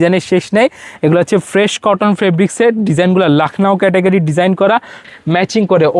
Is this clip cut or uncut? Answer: cut